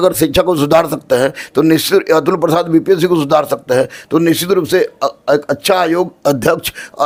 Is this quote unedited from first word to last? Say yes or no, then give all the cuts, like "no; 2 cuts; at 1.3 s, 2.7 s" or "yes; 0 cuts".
yes; 0 cuts